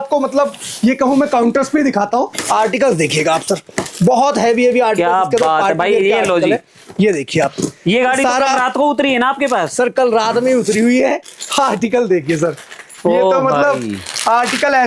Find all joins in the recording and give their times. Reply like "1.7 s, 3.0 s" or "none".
2.4 s